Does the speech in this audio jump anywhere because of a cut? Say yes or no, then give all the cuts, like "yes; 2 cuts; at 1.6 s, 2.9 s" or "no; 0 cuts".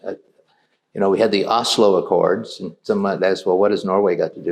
no; 0 cuts